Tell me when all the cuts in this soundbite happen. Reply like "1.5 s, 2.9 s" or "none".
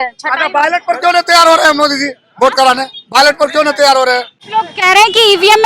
4.4 s